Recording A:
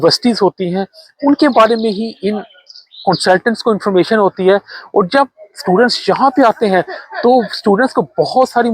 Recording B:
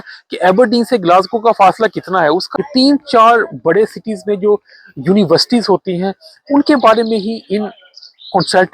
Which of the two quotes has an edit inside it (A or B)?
B